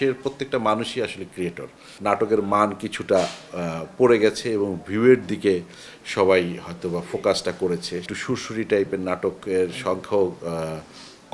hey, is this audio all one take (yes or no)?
no